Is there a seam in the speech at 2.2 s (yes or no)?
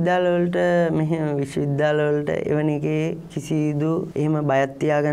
no